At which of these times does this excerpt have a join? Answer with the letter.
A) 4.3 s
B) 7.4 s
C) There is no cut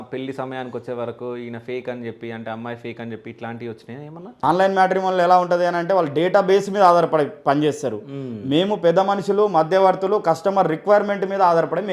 A